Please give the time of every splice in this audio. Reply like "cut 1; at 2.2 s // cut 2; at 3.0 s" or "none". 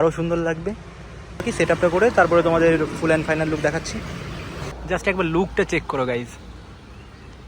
cut 1; at 1.5 s // cut 2; at 4.7 s